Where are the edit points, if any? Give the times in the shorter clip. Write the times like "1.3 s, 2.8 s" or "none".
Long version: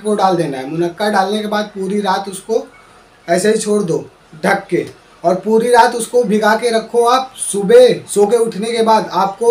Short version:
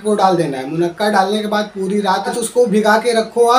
2.4 s

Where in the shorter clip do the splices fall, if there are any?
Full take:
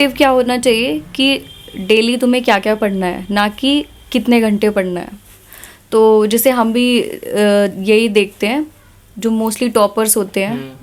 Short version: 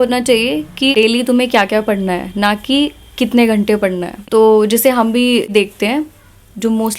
0.9 s, 4.1 s, 5.5 s

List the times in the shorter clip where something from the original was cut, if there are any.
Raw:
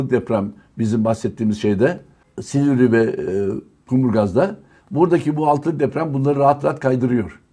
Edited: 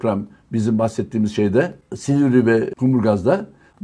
1.9 s, 2.7 s

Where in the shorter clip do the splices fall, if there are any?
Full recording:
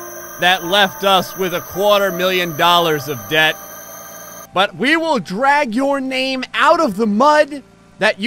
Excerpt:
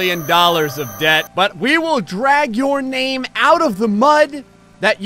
1.3 s

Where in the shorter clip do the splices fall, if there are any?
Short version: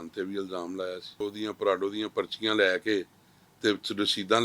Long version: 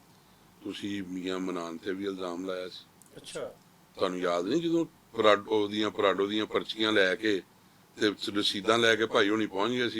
1.2 s

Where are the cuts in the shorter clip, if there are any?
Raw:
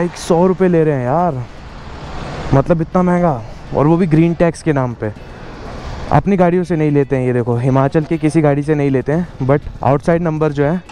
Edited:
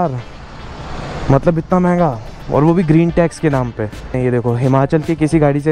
4.2 s

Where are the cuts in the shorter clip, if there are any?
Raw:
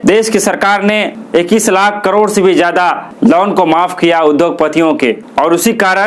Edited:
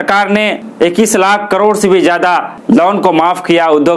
none

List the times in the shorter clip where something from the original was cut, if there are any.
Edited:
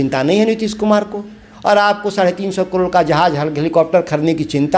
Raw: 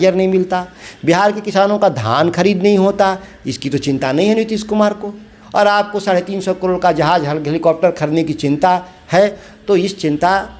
none

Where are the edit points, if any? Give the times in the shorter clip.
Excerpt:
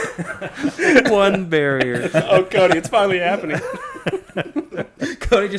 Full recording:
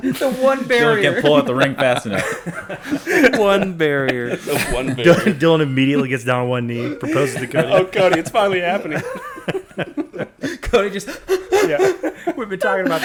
2.0 s

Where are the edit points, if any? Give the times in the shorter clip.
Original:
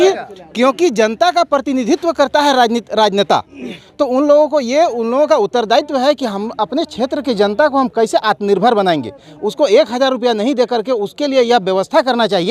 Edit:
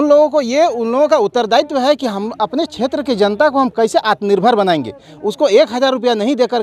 none

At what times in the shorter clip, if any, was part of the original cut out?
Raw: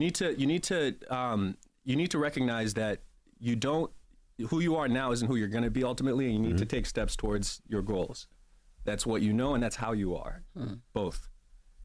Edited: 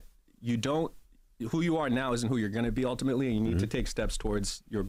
none

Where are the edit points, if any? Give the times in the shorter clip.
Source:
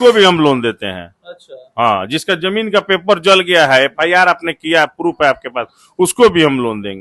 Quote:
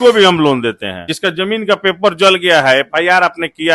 1.1 s

